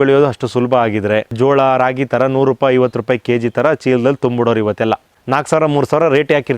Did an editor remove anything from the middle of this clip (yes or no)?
yes